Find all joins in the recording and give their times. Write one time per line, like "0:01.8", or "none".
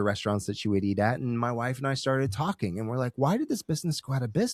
none